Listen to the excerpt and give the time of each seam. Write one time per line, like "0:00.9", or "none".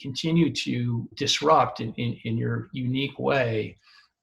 0:01.1